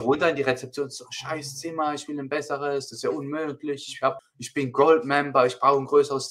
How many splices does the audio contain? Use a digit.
1